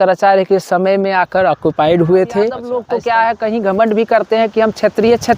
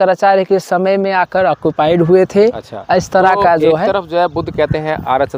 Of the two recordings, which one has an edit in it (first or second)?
first